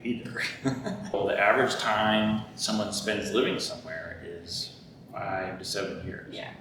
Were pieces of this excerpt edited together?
yes; 1 cut; at 1.1 s

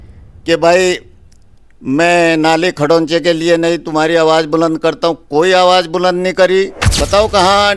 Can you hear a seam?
yes; 1 cut; at 6.8 s

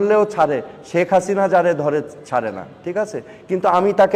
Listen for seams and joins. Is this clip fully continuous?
yes; 0 cuts

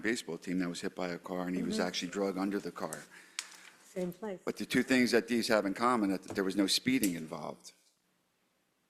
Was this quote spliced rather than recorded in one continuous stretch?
no; 0 cuts

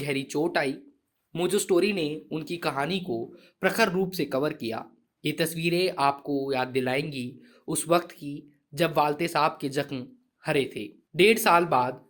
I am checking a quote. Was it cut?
no; 0 cuts

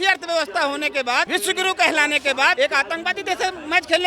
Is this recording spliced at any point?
yes; 2 cuts; at 1.3 s, 2.5 s

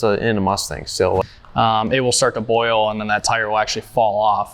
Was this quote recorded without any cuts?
no; 1 cut; at 1.4 s

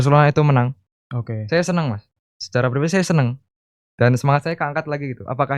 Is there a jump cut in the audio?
no; 0 cuts

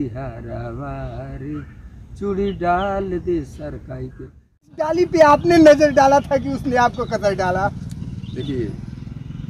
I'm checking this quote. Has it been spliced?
yes; 1 cut; at 4.9 s

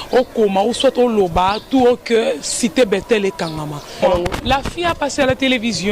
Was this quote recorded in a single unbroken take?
no; 1 cut; at 4.0 s

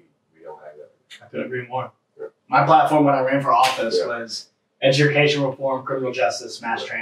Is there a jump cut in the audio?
no; 0 cuts

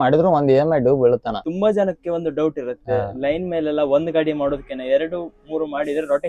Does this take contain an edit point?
yes; 1 cut; at 1.5 s

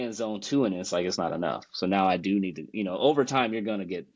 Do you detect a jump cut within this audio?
no; 0 cuts

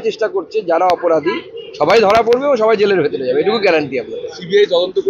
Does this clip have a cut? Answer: no; 0 cuts

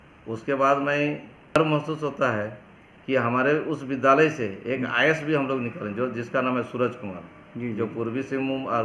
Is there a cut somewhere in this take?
yes; 1 cut; at 1.6 s

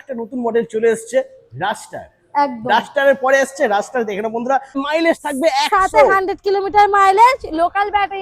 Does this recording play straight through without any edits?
no; 1 cut; at 4.8 s

